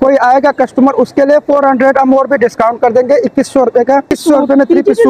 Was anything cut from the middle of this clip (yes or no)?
yes